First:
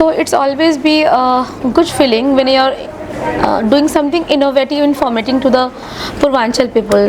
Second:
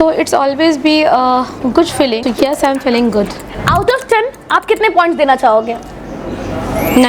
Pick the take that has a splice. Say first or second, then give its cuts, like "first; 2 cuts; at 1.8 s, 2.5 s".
second; 2 cuts; at 2.2 s, 3.5 s